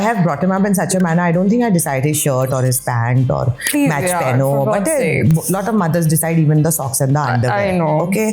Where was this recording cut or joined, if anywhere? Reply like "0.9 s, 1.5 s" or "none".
none